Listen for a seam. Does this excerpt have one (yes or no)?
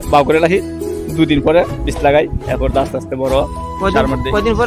no